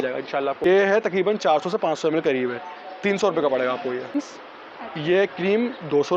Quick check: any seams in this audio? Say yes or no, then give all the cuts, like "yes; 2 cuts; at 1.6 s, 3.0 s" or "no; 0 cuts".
yes; 2 cuts; at 0.7 s, 4.3 s